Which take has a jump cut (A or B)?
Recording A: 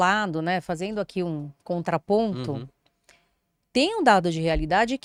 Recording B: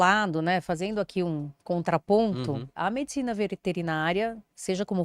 B